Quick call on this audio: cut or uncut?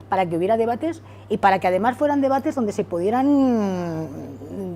uncut